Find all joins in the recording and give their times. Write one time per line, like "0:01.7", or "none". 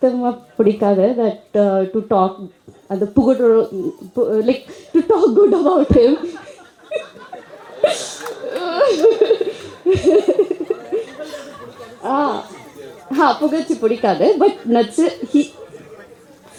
none